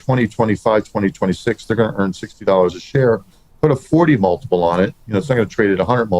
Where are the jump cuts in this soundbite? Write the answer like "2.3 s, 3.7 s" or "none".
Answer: 3.4 s